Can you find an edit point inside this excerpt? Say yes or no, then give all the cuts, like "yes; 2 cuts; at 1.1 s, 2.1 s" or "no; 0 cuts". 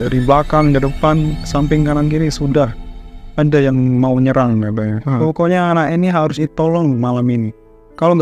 yes; 1 cut; at 5.2 s